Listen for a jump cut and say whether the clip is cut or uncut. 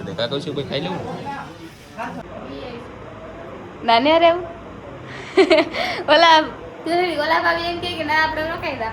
cut